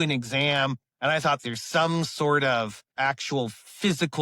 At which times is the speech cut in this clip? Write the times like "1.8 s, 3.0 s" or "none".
1.4 s, 2.9 s